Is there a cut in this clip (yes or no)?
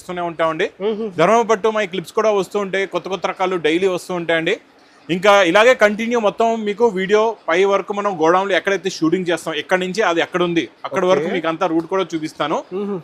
no